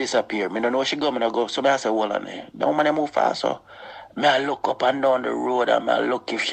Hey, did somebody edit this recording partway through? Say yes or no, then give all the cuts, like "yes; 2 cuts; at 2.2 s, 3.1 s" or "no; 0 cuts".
no; 0 cuts